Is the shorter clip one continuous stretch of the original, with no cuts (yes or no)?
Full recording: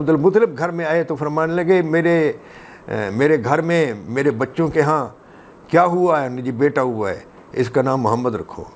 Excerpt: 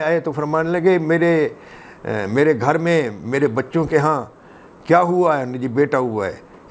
yes